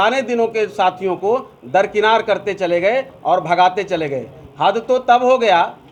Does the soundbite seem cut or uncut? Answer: uncut